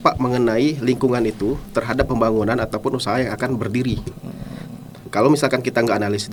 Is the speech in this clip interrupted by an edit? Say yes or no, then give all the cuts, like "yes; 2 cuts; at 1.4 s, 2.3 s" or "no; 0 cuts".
no; 0 cuts